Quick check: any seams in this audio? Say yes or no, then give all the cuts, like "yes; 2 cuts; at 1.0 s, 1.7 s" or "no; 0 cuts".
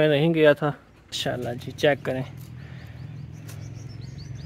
yes; 1 cut; at 1.4 s